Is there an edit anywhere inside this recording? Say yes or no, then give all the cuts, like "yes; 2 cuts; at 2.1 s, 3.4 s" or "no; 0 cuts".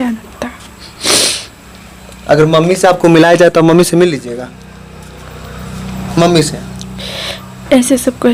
no; 0 cuts